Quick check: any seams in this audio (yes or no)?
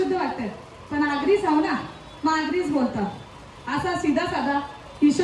no